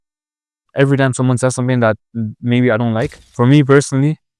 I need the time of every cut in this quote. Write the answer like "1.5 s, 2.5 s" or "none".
3.2 s